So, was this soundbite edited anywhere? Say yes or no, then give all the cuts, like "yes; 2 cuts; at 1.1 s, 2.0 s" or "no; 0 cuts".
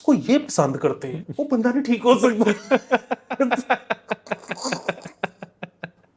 no; 0 cuts